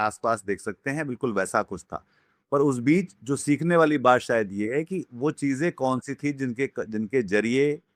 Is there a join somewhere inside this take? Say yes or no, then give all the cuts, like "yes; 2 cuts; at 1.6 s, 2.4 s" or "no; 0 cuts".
no; 0 cuts